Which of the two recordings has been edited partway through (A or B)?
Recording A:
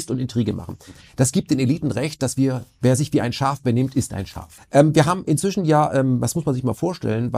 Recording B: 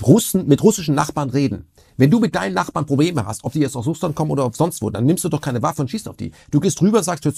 A